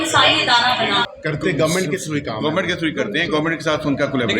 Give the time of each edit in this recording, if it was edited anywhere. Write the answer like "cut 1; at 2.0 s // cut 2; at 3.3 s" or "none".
cut 1; at 1.1 s